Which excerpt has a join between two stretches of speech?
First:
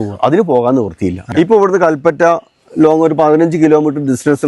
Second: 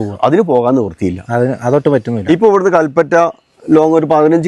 first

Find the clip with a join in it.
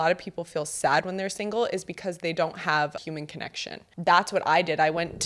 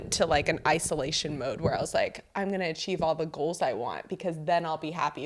first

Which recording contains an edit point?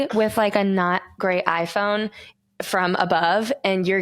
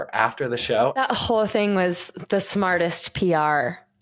second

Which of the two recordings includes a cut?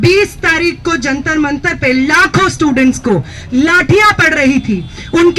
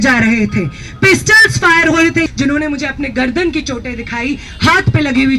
second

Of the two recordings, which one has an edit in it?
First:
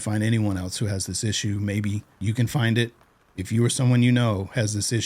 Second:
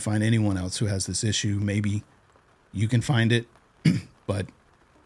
first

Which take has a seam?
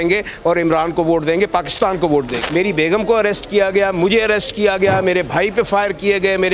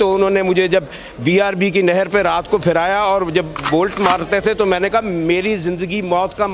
first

